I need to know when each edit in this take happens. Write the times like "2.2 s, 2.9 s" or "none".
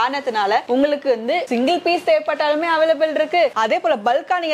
none